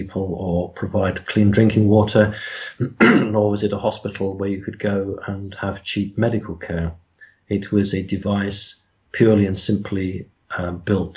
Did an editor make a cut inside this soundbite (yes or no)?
no